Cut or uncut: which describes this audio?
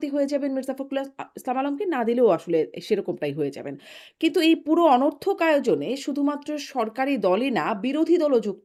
uncut